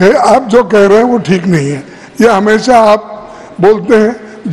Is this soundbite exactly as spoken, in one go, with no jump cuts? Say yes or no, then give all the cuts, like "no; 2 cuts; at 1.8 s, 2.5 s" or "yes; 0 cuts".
yes; 0 cuts